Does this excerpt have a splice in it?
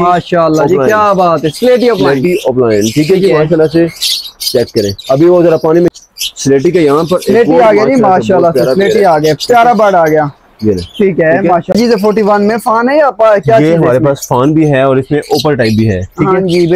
yes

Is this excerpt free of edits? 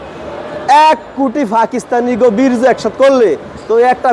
yes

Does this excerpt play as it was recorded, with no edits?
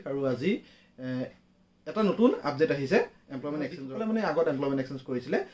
no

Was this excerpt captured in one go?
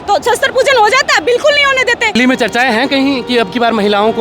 no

